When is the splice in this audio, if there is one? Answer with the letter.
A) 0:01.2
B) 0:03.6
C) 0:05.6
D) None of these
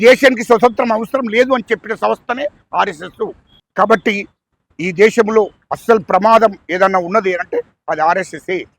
B